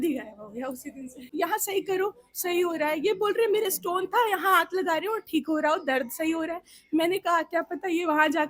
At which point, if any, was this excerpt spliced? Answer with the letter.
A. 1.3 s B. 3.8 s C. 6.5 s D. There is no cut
A